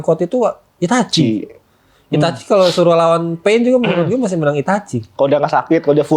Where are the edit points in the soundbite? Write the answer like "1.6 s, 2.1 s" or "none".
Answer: none